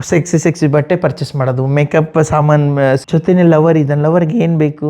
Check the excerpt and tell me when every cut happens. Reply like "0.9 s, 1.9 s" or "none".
3.0 s